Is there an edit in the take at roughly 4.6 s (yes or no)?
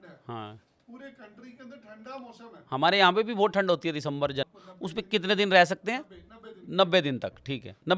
yes